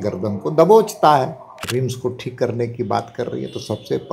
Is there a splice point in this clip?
yes; 1 cut; at 1.5 s

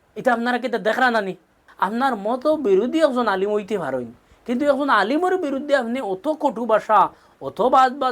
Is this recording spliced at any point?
yes; 1 cut; at 1.6 s

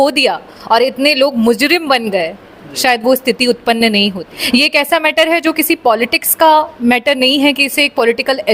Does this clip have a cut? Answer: yes; 1 cut; at 4.3 s

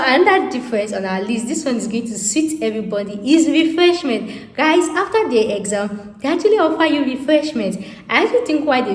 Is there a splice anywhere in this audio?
no; 0 cuts

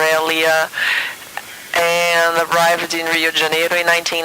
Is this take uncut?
no; 1 cut; at 2.5 s

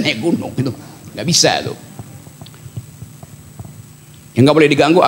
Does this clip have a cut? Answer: no; 0 cuts

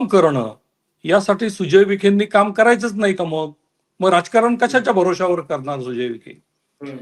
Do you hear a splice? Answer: no; 0 cuts

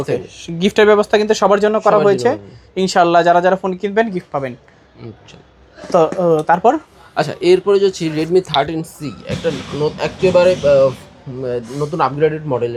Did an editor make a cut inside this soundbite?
no; 0 cuts

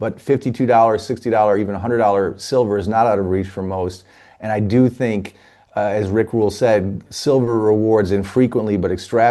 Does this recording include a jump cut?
no; 0 cuts

